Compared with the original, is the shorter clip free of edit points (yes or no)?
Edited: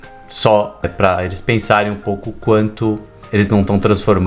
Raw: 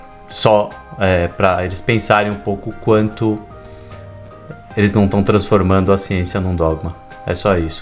no